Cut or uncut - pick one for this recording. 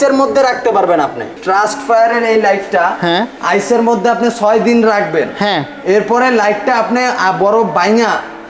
cut